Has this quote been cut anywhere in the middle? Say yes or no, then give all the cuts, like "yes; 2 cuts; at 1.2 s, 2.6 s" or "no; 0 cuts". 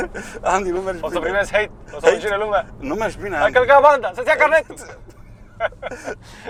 no; 0 cuts